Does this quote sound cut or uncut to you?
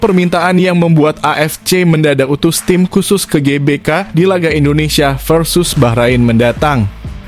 uncut